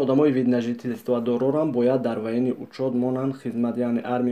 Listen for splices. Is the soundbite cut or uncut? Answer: uncut